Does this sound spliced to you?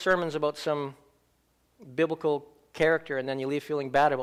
no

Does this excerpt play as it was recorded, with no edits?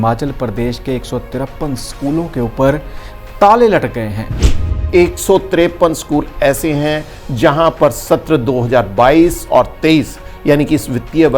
no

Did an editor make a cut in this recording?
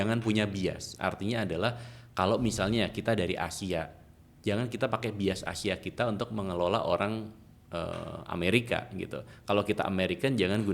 no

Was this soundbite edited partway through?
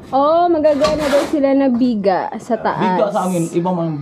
no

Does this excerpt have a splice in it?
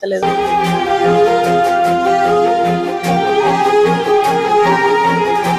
no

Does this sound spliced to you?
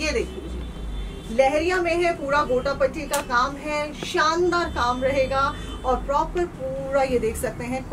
no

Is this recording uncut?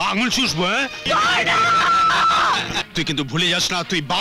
no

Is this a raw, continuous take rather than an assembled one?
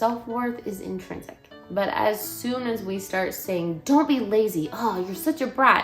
no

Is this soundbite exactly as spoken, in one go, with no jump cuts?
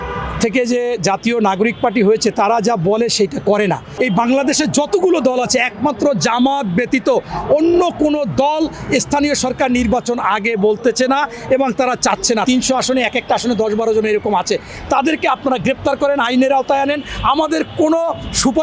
no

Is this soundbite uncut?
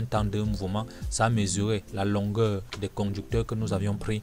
no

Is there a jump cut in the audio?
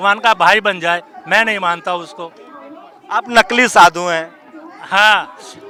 no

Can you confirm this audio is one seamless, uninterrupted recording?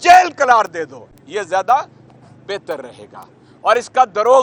yes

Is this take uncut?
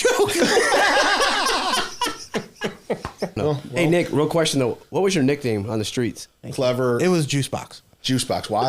no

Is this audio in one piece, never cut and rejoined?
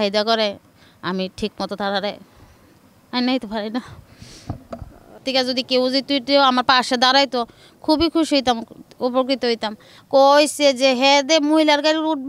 no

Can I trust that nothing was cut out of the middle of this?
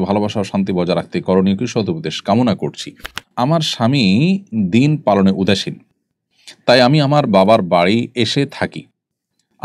no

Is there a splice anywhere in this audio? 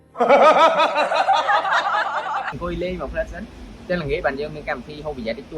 yes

